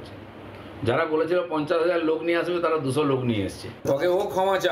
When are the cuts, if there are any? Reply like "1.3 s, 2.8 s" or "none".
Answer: 3.7 s